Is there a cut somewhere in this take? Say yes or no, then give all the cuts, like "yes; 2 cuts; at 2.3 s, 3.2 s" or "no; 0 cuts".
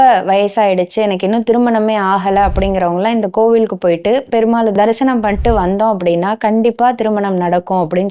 no; 0 cuts